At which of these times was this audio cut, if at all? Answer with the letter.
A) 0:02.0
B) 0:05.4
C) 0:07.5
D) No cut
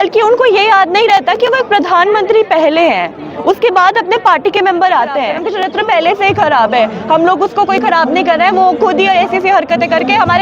B